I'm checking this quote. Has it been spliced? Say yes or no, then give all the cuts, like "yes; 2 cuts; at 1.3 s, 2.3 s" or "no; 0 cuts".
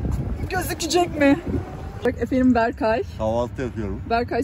yes; 1 cut; at 2.1 s